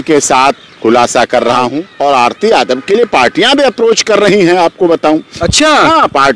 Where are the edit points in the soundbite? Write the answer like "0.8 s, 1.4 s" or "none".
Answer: 1.8 s